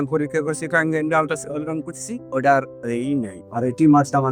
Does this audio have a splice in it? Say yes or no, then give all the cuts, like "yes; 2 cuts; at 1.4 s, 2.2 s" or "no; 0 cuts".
no; 0 cuts